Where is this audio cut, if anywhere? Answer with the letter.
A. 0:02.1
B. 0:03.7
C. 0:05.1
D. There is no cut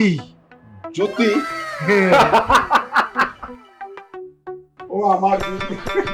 D